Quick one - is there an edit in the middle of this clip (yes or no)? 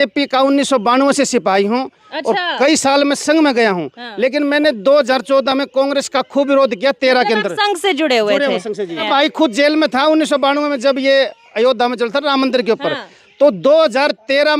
yes